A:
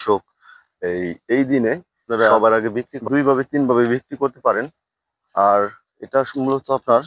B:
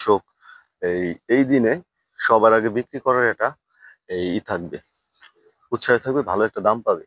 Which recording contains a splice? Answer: A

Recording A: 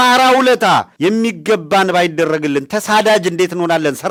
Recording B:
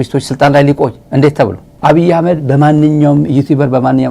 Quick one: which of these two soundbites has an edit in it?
B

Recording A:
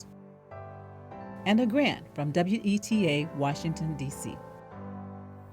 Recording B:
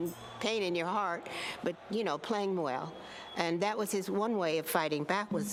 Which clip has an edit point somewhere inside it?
A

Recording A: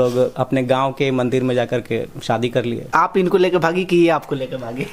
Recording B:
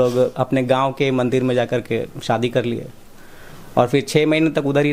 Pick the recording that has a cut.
A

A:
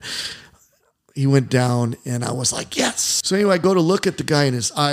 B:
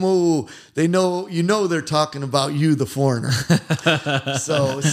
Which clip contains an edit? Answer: A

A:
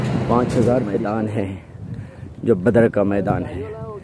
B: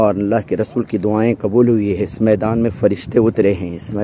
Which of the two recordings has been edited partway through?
A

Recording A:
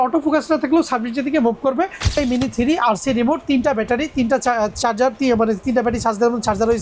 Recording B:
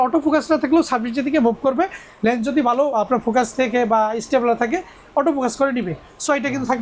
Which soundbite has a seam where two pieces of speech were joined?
A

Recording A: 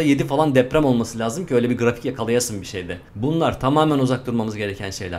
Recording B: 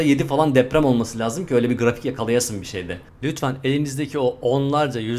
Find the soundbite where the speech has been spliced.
B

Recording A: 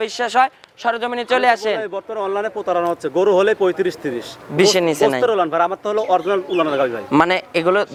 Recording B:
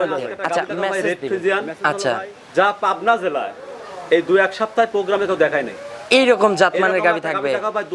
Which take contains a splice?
B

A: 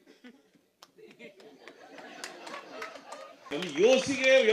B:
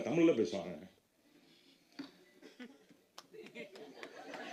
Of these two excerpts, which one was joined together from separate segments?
A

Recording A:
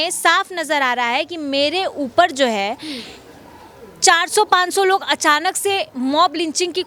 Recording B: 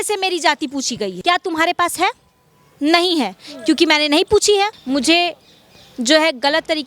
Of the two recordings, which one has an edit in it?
B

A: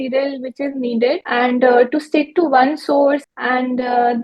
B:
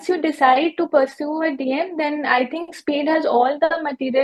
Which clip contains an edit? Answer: A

